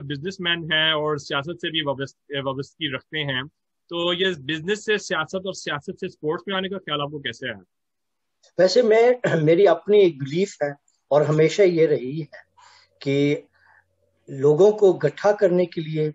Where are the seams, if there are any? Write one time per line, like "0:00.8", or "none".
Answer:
none